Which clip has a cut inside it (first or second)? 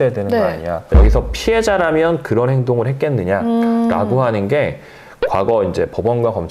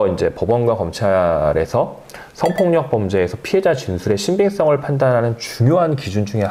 first